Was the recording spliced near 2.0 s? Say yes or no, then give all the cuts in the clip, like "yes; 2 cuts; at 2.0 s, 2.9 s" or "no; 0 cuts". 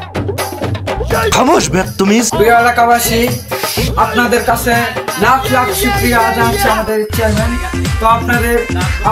no; 0 cuts